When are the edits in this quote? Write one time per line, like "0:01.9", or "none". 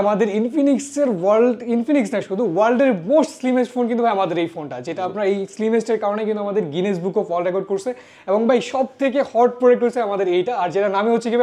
none

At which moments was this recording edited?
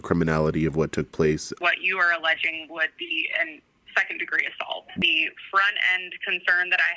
0:01.5
0:05.0

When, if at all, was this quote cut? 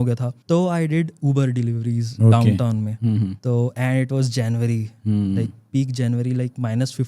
0:03.4

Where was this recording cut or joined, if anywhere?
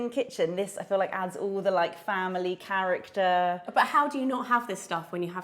none

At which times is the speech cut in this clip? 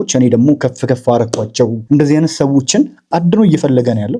0:01.8

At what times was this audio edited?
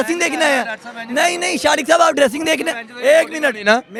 none

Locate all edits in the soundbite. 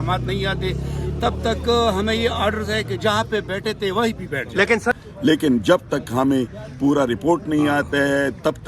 0:04.9

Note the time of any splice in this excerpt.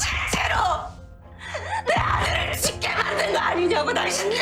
none

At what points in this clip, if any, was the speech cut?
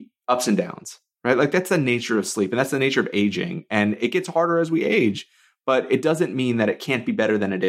none

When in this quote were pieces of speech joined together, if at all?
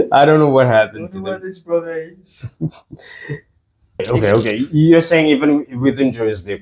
0:04.0

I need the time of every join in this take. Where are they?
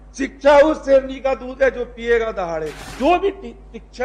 0:02.8

